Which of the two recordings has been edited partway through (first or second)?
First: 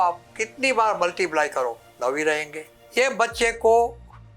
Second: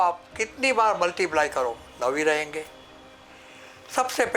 first